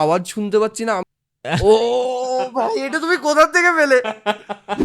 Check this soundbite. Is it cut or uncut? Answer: cut